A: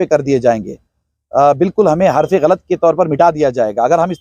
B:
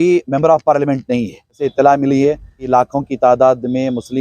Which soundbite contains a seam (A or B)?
B